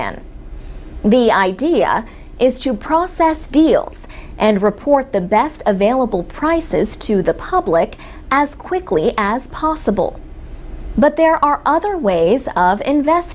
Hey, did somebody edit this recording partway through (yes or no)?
yes